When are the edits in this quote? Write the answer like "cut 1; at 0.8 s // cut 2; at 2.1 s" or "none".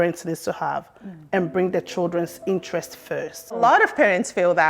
cut 1; at 3.6 s